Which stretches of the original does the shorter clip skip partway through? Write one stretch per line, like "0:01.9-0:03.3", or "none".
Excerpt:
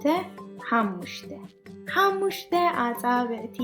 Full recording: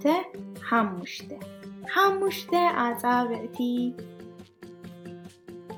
none